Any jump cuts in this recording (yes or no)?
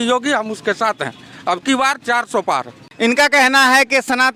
no